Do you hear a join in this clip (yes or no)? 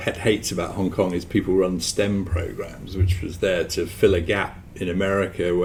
no